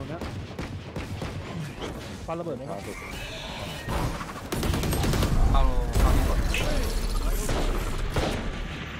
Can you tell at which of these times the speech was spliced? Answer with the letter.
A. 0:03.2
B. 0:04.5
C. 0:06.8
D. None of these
D